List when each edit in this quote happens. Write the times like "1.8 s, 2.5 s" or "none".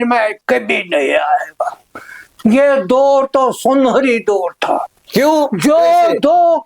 none